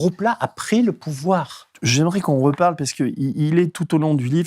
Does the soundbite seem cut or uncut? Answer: cut